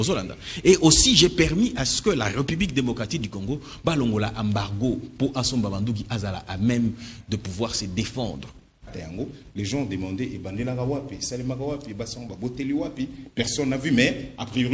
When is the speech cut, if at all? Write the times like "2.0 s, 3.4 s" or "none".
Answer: 9.0 s